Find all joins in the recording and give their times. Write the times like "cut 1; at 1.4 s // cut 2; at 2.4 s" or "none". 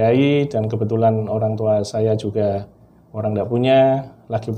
none